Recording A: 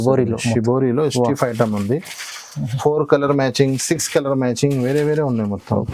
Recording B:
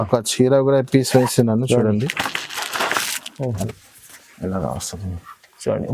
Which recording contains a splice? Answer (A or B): B